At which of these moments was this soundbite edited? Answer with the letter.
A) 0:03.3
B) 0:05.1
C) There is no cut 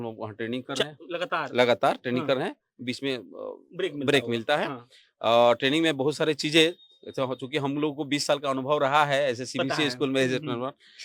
C